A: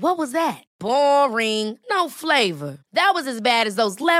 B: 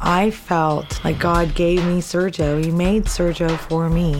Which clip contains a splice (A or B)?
B